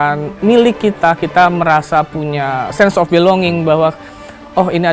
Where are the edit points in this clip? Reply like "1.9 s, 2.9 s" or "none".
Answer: 2.7 s